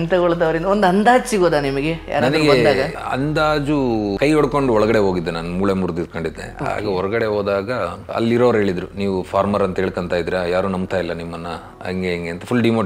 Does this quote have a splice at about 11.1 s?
no; 3 cuts; at 3.0 s, 4.1 s, 8.1 s

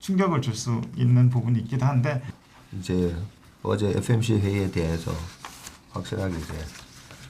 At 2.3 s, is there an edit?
yes; 1 cut; at 2.3 s

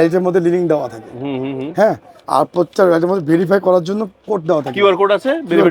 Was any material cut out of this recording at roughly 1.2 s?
no; 0 cuts

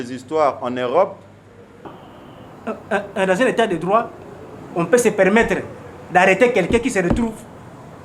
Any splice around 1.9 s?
yes; 1 cut; at 1.9 s

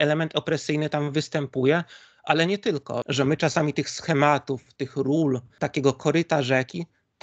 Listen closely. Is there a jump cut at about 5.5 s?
yes; 2 cuts; at 3.0 s, 5.5 s

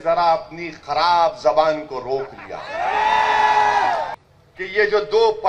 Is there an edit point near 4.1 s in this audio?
yes; 1 cut; at 4.1 s

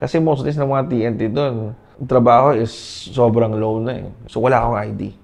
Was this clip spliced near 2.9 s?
no; 1 cut; at 4.2 s

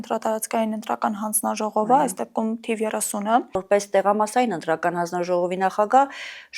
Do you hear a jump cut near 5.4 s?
no; 1 cut; at 3.6 s

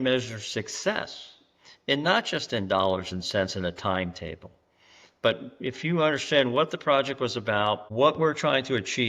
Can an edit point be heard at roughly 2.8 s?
no; 1 cut; at 7.9 s

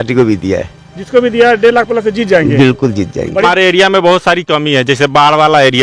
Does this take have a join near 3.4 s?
yes; 1 cut; at 3.4 s

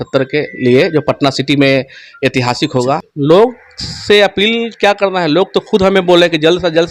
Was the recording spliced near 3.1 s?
yes; 1 cut; at 3.1 s

